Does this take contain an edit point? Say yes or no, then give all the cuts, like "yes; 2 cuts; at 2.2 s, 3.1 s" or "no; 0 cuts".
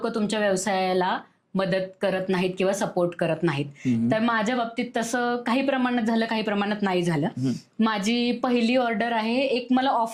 no; 0 cuts